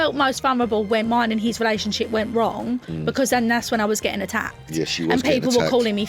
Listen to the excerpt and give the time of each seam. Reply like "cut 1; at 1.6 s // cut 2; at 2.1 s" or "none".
cut 1; at 1.0 s